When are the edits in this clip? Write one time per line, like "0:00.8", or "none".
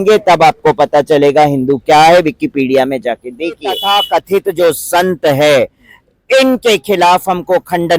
0:03.7